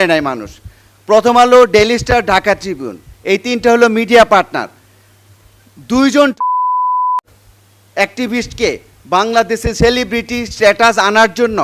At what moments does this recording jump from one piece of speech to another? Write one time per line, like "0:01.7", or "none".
none